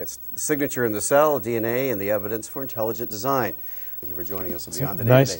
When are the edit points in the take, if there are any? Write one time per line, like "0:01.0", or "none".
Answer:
0:04.1